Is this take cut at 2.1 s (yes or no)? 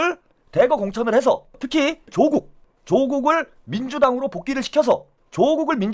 yes